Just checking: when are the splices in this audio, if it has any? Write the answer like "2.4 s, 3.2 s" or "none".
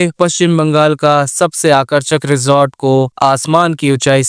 none